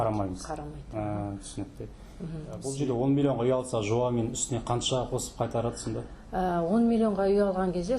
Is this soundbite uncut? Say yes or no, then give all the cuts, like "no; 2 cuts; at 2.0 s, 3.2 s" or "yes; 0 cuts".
no; 1 cut; at 2.7 s